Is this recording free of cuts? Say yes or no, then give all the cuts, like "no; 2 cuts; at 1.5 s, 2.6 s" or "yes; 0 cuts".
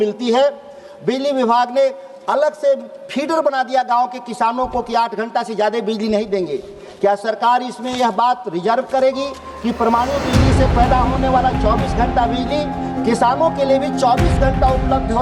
yes; 0 cuts